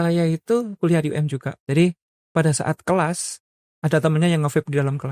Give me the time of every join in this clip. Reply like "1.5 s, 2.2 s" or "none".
1.5 s